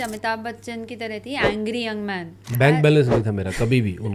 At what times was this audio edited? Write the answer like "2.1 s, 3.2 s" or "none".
2.5 s